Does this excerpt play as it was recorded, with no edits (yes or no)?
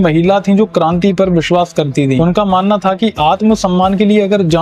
no